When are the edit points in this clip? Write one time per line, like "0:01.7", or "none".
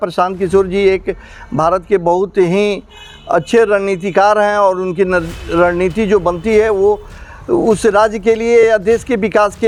none